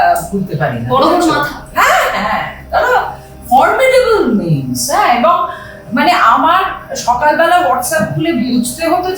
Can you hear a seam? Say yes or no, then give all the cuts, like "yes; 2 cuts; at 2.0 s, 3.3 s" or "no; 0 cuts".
no; 0 cuts